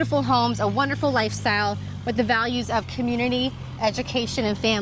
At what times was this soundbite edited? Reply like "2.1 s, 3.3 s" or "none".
none